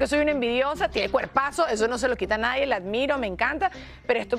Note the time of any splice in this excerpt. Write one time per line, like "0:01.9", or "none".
none